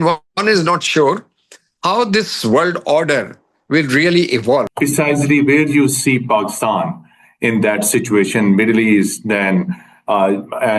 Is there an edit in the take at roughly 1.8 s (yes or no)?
no